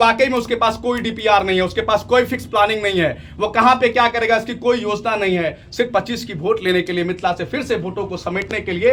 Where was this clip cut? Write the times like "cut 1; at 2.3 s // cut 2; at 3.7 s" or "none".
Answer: none